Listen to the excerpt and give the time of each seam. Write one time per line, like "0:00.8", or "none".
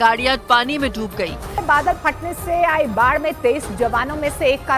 0:01.5